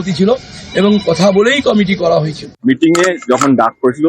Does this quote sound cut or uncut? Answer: cut